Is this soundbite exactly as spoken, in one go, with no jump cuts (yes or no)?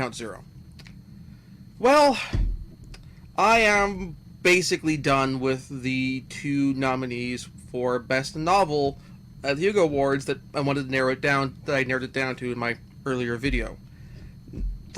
yes